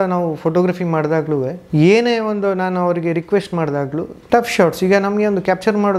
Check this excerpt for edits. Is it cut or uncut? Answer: cut